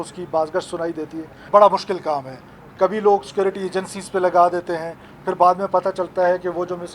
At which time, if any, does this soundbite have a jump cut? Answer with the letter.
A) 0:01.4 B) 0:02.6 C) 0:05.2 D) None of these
A